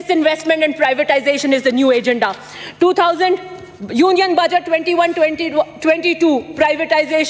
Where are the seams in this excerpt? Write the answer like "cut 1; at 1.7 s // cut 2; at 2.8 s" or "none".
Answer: none

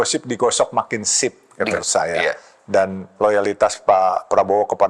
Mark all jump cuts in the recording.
cut 1; at 1.7 s

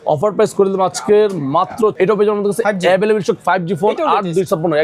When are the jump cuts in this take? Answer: cut 1; at 1.9 s

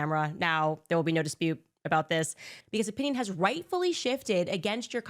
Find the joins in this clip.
cut 1; at 2.6 s

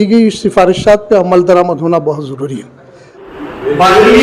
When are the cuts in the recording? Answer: cut 1; at 3.2 s

